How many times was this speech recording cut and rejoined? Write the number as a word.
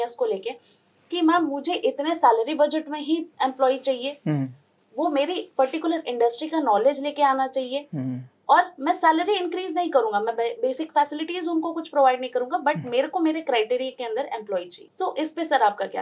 one